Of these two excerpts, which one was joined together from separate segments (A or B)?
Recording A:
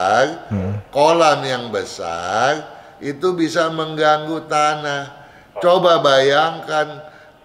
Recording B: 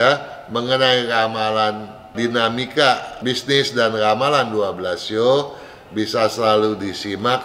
B